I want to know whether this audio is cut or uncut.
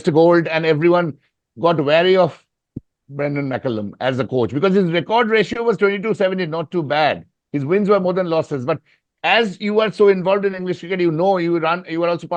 uncut